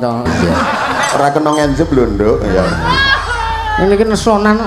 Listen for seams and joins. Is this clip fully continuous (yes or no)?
no